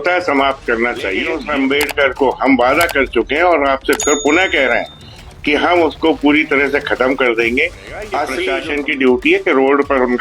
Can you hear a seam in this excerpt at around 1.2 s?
yes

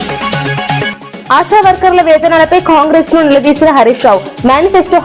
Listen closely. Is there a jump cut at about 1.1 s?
yes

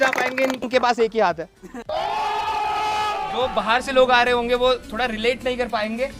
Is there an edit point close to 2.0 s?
no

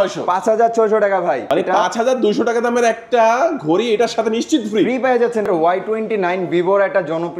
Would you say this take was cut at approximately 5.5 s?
yes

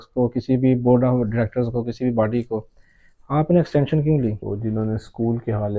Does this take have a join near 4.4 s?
yes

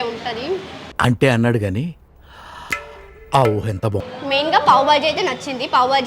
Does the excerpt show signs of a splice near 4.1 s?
yes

